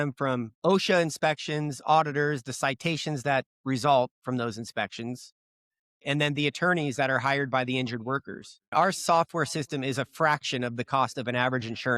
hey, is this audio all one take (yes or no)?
no